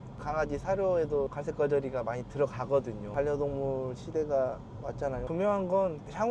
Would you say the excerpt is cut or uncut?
cut